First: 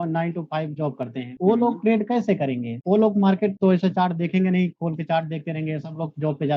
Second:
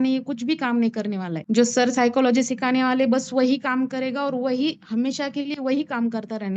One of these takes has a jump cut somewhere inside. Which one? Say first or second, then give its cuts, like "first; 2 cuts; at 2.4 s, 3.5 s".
first; 4 cuts; at 1.3 s, 2.7 s, 3.6 s, 4.8 s